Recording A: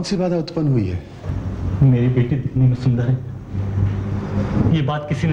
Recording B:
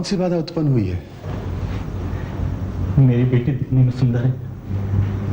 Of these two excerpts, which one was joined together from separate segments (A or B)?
A